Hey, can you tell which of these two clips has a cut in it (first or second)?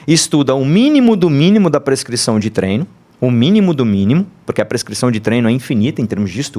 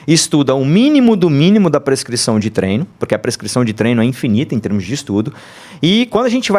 second